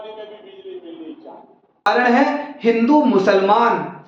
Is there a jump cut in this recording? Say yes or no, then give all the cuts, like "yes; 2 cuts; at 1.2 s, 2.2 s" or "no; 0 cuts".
yes; 1 cut; at 1.6 s